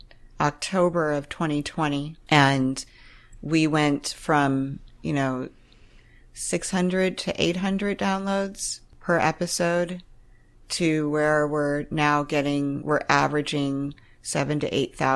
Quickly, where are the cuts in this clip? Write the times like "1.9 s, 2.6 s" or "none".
none